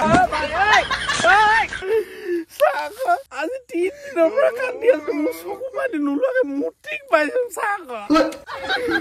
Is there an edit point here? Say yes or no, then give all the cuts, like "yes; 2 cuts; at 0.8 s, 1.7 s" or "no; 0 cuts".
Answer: yes; 2 cuts; at 1.8 s, 3.3 s